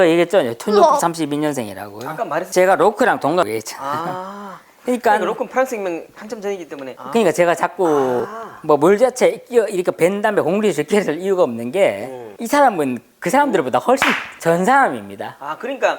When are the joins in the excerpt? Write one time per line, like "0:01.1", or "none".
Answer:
none